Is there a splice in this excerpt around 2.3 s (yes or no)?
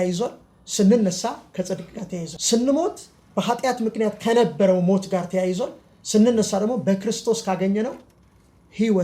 yes